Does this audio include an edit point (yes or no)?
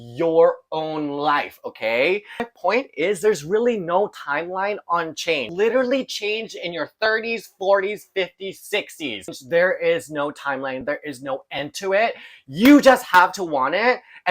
yes